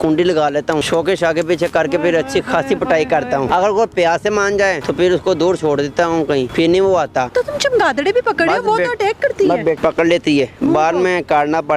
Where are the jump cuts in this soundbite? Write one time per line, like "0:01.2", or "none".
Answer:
0:00.9
0:03.5
0:04.8
0:06.5
0:07.3
0:09.8